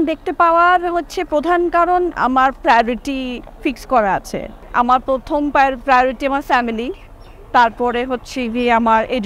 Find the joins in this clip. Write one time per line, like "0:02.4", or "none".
none